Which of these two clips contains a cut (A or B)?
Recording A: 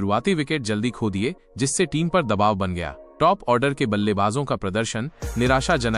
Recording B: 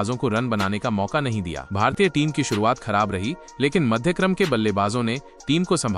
B